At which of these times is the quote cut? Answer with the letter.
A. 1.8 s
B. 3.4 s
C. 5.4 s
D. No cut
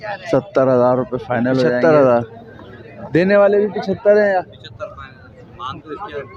A